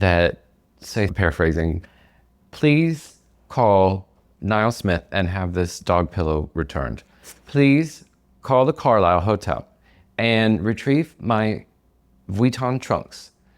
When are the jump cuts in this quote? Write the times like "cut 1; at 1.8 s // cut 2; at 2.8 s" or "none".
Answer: cut 1; at 1.1 s